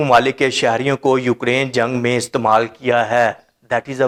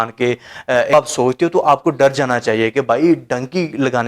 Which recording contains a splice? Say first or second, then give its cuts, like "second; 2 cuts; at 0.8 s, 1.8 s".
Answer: second; 1 cut; at 0.9 s